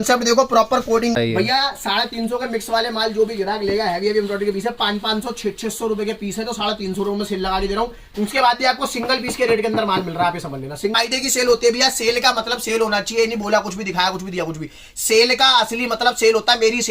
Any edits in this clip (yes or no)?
yes